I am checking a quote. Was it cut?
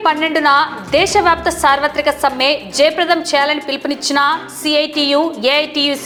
no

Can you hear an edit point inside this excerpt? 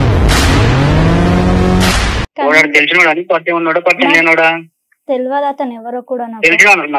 no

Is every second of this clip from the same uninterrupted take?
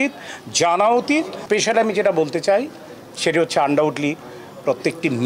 no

